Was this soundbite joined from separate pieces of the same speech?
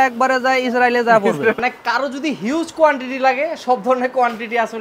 yes; 1 cut; at 1.6 s

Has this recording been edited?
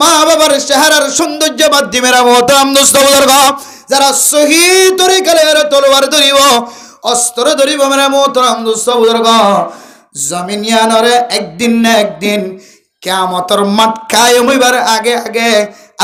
no; 0 cuts

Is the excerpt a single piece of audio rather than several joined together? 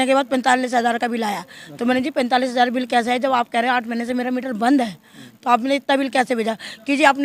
yes; 0 cuts

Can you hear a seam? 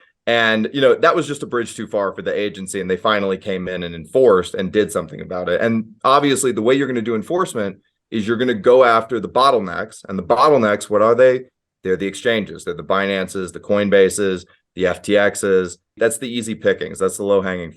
yes; 1 cut; at 16.0 s

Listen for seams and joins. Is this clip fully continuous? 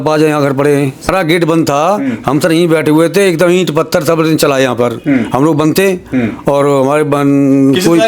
no; 1 cut; at 1.1 s

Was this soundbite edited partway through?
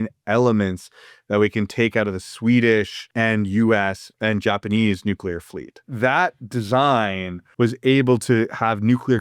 yes; 4 cuts; at 3.0 s, 4.1 s, 5.8 s, 7.4 s

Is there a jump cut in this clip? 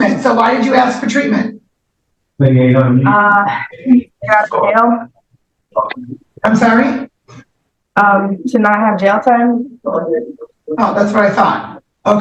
no; 0 cuts

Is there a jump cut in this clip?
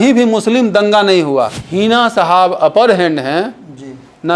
yes; 1 cut; at 1.6 s

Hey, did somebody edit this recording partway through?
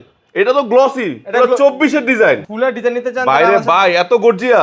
yes; 1 cut; at 2.5 s

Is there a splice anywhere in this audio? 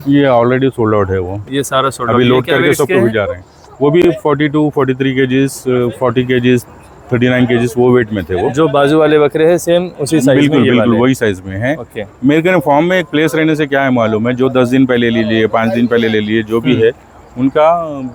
no; 0 cuts

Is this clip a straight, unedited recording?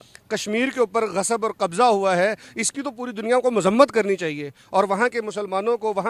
yes; 0 cuts

